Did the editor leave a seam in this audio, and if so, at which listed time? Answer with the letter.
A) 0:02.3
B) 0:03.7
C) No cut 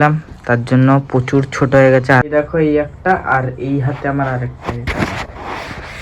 A